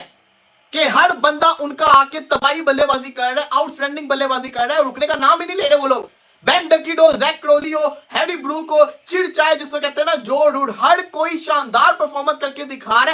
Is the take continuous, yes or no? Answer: yes